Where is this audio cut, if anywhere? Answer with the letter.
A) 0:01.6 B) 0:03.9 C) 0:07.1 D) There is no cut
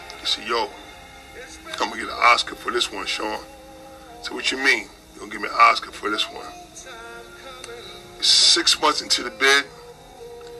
D